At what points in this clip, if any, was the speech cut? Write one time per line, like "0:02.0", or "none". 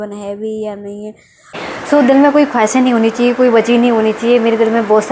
0:01.6